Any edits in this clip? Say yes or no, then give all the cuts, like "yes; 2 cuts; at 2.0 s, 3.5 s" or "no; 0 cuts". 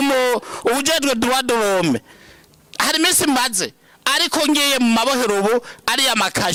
no; 0 cuts